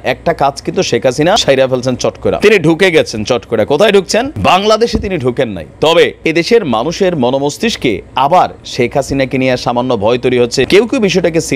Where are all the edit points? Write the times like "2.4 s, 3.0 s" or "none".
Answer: 1.4 s, 2.4 s, 4.3 s, 6.2 s, 10.7 s